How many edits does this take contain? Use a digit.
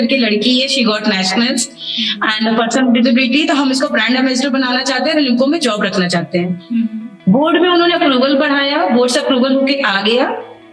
0